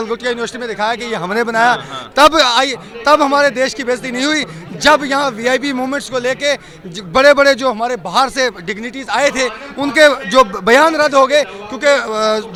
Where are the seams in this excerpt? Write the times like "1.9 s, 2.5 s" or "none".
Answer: none